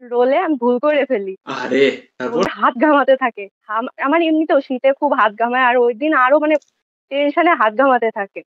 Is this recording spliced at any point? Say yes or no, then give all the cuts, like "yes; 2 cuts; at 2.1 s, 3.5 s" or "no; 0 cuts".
yes; 1 cut; at 2.5 s